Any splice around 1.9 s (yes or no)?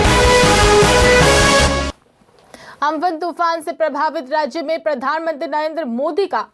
yes